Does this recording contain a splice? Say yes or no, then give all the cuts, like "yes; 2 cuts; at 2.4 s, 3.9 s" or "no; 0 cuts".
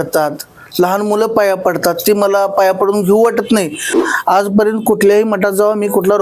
yes; 1 cut; at 4.0 s